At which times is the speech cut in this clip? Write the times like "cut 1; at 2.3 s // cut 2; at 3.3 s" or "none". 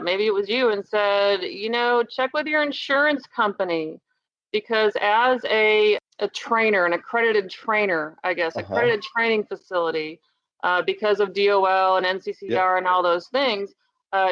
cut 1; at 6.0 s